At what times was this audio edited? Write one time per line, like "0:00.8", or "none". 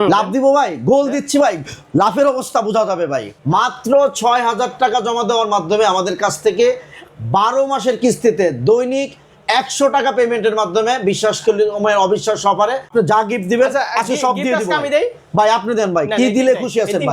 0:03.3
0:12.9